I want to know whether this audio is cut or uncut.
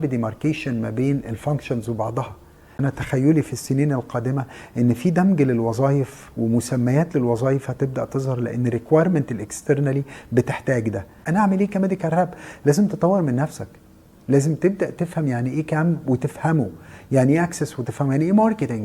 cut